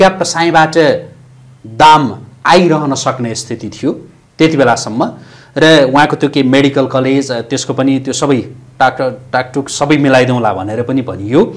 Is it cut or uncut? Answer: uncut